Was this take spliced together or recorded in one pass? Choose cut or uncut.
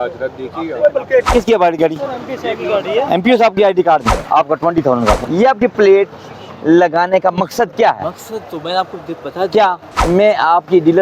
cut